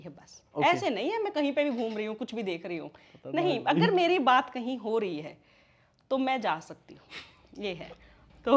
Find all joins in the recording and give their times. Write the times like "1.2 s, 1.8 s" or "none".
none